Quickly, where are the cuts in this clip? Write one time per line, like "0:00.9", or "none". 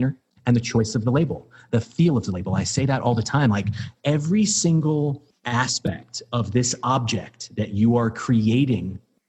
0:05.3